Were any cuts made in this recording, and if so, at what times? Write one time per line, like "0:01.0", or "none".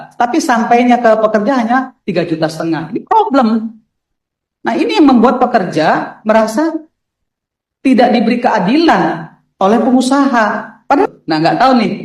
0:11.1